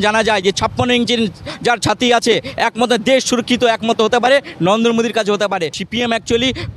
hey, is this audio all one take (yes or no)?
no